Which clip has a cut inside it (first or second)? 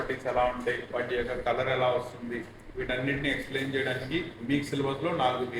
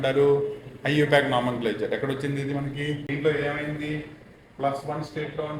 second